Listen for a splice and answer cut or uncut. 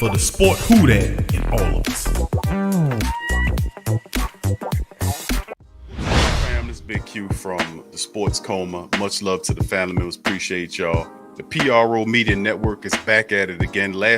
cut